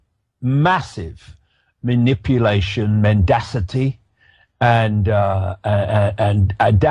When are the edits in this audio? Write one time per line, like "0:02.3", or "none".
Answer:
none